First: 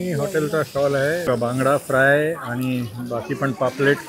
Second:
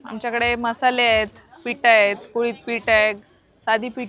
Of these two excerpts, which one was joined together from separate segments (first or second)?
first